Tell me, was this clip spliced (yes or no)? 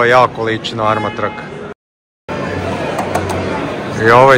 yes